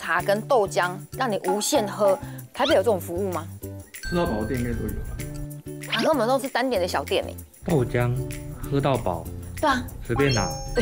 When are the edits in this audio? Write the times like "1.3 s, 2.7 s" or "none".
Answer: none